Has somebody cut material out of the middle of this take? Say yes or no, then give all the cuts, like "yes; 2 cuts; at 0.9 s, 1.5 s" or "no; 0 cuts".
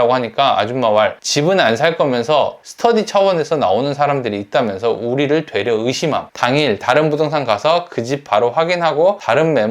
yes; 1 cut; at 6.3 s